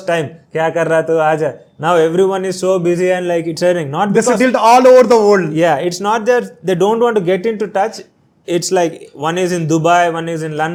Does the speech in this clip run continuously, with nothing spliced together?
yes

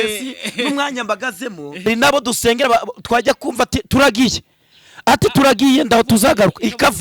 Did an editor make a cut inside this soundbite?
yes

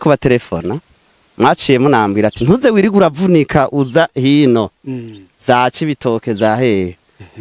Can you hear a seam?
no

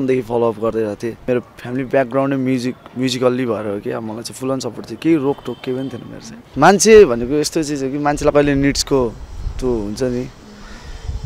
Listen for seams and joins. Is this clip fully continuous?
no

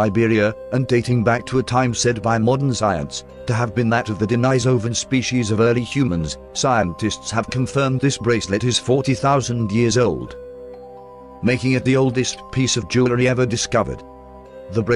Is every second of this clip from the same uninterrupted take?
yes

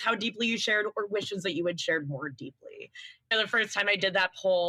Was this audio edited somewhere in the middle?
no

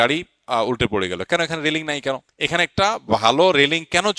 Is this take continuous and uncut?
no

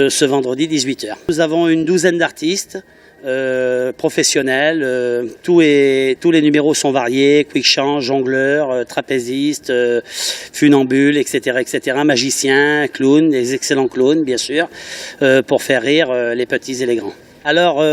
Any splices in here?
no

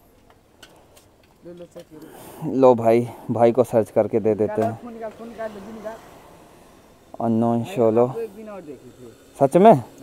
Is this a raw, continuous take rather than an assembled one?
yes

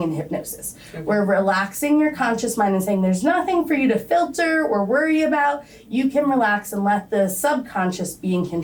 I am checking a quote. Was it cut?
no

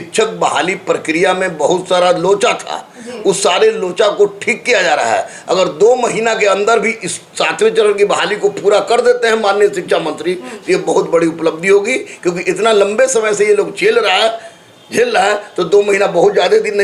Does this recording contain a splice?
no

